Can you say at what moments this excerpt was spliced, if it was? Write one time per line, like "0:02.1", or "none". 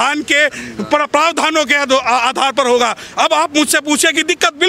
none